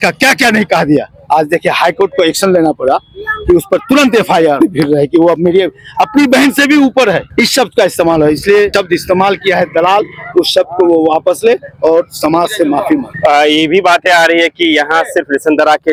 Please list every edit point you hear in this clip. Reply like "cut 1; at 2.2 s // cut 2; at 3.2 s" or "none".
none